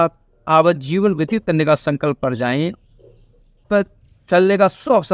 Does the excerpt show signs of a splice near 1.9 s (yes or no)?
no